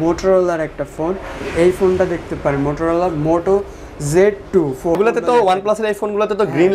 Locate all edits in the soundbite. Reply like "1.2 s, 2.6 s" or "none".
5.0 s